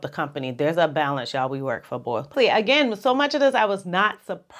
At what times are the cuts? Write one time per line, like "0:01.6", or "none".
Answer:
0:02.3